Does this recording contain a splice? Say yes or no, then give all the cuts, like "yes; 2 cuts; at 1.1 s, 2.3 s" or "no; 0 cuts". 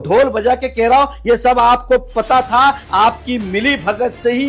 no; 0 cuts